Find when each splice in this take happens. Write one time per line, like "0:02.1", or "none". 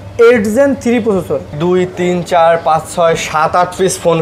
0:01.5

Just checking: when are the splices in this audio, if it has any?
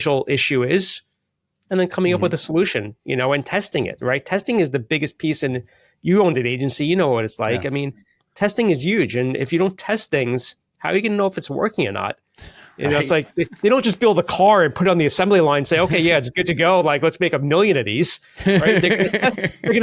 none

